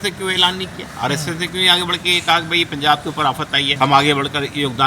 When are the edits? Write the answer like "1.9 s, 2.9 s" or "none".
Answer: 3.7 s